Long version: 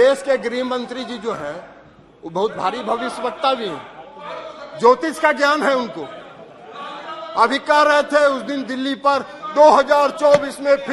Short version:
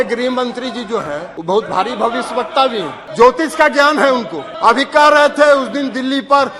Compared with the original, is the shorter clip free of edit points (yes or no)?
no